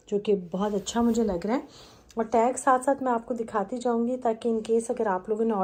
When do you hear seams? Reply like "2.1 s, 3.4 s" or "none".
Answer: none